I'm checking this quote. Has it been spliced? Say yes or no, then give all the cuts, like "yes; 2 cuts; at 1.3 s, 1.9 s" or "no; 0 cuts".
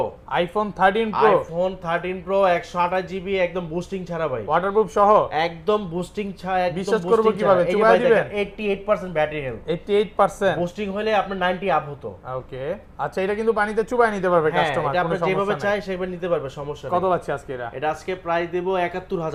no; 0 cuts